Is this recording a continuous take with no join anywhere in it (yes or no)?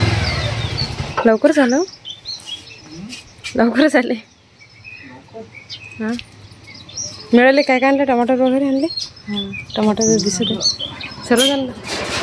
no